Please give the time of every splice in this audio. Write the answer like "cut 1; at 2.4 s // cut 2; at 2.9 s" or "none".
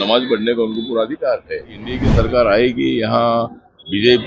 cut 1; at 2.0 s